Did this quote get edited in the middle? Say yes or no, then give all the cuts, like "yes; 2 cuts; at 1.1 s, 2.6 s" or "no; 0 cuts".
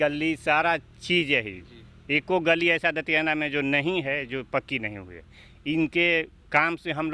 no; 0 cuts